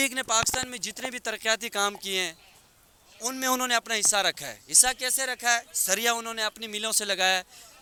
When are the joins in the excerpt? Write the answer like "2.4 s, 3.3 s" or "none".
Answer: none